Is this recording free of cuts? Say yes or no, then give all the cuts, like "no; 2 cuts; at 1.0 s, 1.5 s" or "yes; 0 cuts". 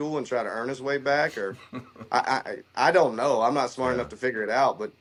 yes; 0 cuts